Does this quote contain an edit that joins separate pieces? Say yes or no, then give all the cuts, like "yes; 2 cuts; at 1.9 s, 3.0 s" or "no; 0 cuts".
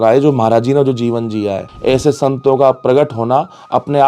yes; 1 cut; at 1.7 s